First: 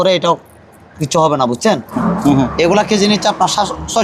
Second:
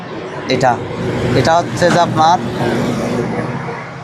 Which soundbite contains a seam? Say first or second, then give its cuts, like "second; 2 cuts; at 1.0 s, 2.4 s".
first; 1 cut; at 1.9 s